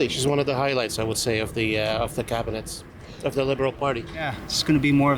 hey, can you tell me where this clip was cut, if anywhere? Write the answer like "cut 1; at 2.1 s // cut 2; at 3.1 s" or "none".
cut 1; at 4.1 s